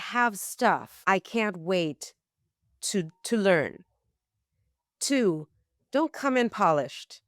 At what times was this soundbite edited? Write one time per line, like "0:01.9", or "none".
0:00.9